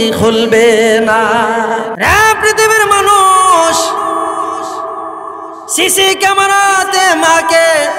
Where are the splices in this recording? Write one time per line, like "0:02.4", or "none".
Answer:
0:01.9